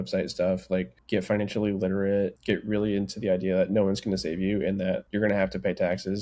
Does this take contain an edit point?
yes; 3 cuts; at 1.0 s, 2.4 s, 5.0 s

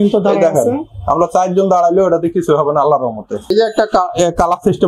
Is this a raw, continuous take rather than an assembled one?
no; 1 cut; at 3.5 s

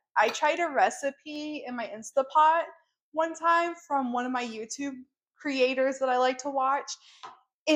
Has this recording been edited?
no; 0 cuts

